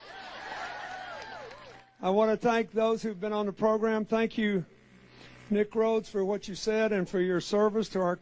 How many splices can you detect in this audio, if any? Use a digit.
1